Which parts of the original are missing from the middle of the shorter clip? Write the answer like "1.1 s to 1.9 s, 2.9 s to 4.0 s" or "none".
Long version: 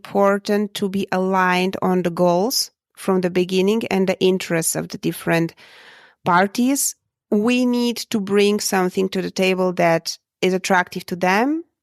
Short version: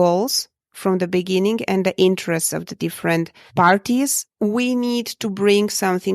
5.6 s to 6.1 s, 6.9 s to 7.1 s